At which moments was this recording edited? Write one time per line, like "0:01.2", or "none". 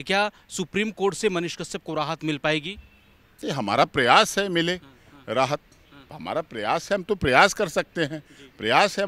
none